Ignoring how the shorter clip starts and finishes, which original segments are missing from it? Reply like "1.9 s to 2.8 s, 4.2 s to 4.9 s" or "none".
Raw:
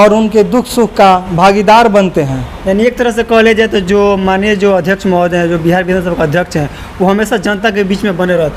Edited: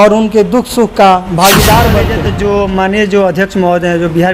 2.2 s to 3.7 s